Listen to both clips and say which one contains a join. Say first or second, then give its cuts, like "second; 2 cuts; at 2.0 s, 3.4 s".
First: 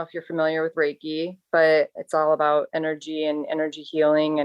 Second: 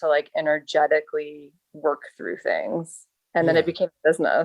first; 1 cut; at 2.0 s